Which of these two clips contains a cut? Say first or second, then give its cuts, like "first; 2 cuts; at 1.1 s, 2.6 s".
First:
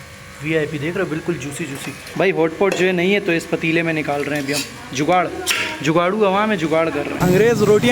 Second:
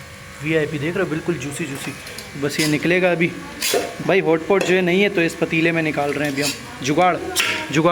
first; 2 cuts; at 2.0 s, 7.2 s